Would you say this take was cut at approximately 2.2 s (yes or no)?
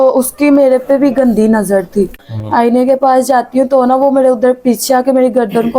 yes